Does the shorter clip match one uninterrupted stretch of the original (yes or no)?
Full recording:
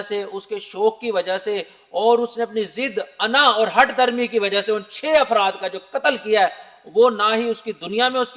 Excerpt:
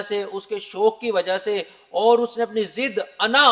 yes